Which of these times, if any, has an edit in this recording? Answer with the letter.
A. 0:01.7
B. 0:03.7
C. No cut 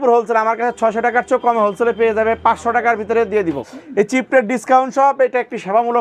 B